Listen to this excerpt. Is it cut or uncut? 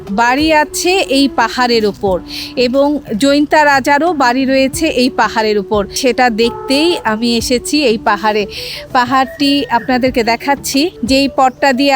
uncut